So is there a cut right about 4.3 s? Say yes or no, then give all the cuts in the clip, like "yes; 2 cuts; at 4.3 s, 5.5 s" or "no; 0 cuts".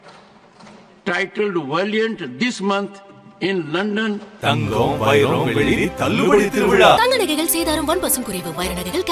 yes; 1 cut; at 4.3 s